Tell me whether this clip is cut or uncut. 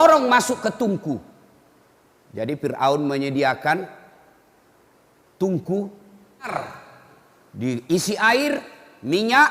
cut